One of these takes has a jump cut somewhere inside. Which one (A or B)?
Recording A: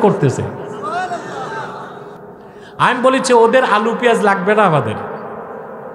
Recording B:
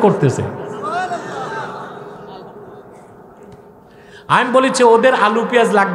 A